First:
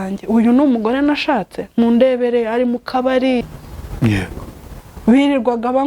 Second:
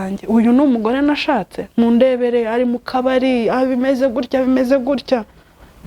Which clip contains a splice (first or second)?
first